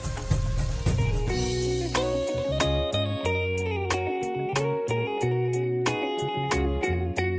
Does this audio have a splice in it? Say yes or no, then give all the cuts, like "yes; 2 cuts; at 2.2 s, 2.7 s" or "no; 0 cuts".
yes; 1 cut; at 1.0 s